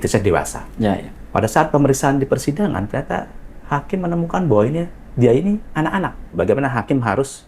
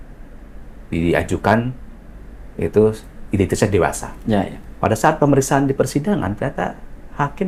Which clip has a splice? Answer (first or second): first